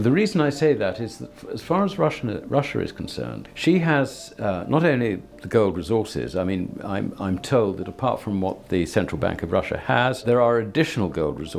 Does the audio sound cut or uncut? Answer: cut